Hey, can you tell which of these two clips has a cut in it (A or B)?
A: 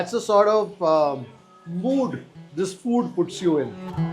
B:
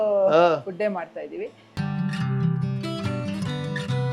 B